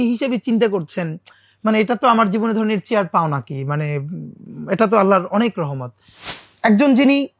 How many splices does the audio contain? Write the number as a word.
one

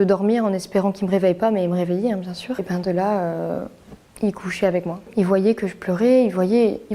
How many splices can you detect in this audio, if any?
two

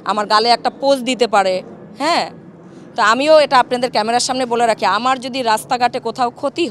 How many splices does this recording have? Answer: zero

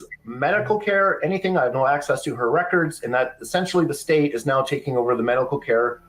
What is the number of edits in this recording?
zero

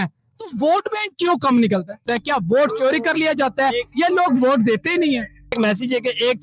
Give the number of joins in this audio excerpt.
two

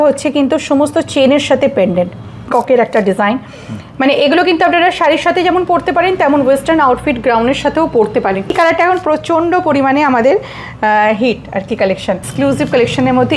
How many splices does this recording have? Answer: three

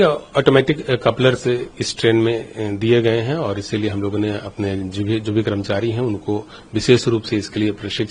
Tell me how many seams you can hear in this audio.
zero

